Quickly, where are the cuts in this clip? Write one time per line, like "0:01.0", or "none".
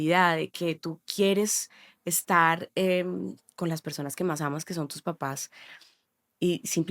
none